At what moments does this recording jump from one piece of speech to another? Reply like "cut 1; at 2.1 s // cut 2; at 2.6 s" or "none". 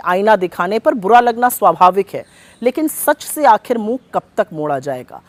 none